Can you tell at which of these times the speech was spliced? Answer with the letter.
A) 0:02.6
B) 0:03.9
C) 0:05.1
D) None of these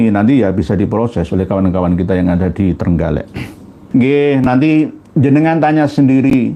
B